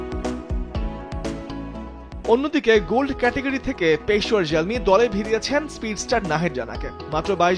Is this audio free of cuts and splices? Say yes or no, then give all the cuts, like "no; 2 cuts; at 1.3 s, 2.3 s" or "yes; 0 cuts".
no; 1 cut; at 1.4 s